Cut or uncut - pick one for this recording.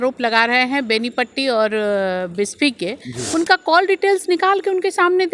uncut